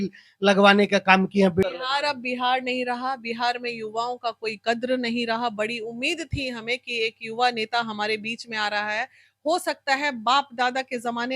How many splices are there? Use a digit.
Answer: 1